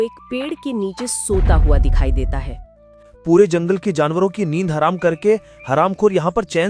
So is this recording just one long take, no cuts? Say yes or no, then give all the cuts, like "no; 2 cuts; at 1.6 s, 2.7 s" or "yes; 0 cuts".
yes; 0 cuts